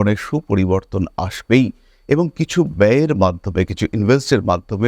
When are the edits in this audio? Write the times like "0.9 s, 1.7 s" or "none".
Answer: none